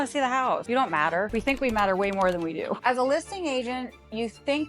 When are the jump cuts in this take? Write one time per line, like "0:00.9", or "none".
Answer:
0:01.1
0:02.8